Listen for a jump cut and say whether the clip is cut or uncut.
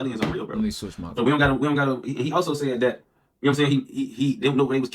cut